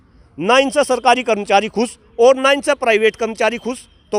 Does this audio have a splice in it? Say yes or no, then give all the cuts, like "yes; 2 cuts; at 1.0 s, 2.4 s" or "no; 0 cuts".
no; 0 cuts